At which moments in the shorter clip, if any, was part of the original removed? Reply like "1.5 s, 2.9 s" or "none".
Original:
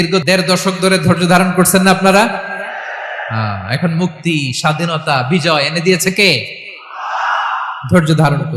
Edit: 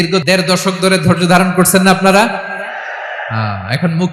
none